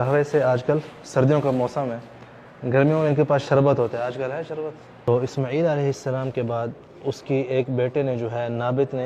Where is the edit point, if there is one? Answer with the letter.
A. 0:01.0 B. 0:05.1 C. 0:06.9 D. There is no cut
B